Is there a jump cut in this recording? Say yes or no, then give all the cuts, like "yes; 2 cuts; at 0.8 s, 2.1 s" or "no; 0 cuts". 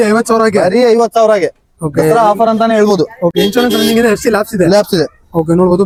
no; 0 cuts